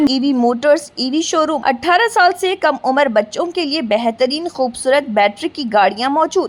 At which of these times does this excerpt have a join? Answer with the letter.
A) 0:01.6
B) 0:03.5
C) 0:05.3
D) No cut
A